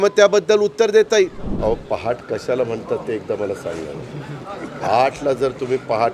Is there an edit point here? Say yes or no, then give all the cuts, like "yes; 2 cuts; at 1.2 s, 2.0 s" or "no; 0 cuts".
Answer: yes; 1 cut; at 1.4 s